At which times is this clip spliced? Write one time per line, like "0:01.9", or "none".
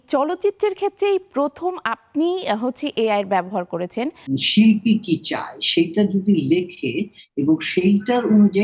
0:04.4